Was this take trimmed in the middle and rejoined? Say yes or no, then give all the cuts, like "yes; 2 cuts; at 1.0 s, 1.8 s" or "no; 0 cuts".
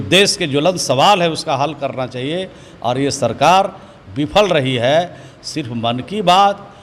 no; 0 cuts